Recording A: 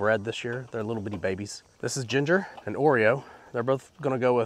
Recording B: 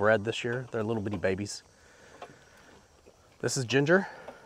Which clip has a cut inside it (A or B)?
A